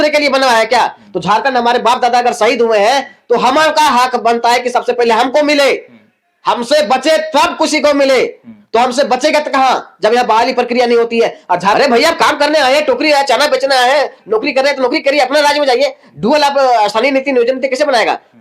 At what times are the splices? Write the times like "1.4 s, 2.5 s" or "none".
11.7 s